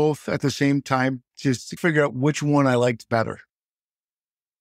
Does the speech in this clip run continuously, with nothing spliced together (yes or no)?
yes